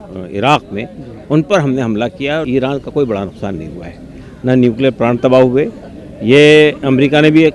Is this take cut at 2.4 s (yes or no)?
yes